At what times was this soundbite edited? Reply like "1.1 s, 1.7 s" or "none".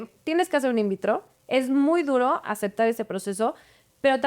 none